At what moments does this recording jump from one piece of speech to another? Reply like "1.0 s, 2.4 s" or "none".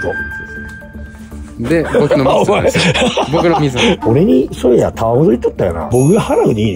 4.0 s, 5.8 s